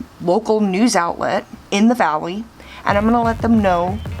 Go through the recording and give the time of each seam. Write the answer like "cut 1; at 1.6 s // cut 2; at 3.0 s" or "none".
cut 1; at 1.6 s